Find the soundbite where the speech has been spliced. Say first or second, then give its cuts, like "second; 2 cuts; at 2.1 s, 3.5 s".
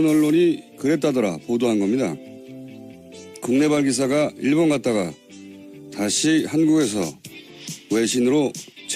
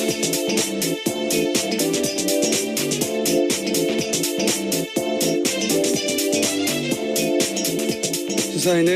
second; 1 cut; at 5.7 s